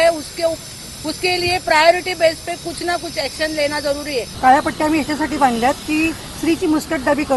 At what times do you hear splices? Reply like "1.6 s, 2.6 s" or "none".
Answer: 4.3 s

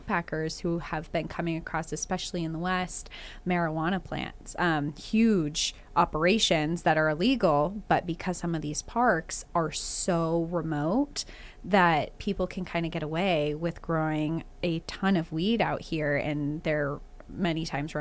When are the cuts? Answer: none

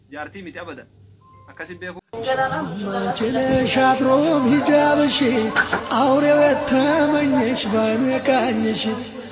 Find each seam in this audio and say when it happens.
2.0 s

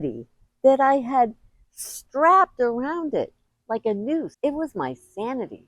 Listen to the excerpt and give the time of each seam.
4.3 s

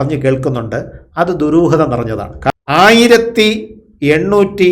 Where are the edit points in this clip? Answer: 2.4 s

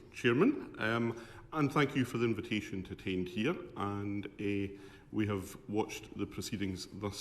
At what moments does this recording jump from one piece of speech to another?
3.7 s

